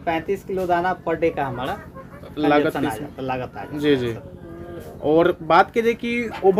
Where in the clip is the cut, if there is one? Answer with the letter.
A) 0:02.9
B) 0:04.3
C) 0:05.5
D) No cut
D